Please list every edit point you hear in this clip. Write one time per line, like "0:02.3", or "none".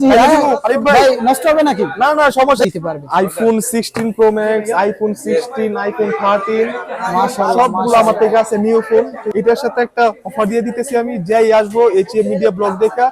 0:02.6
0:09.2